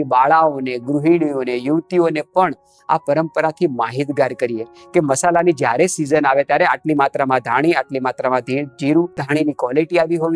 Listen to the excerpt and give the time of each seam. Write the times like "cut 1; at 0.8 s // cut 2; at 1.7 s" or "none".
cut 1; at 9.2 s